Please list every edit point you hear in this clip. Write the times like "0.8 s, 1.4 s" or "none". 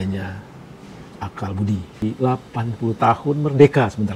2.0 s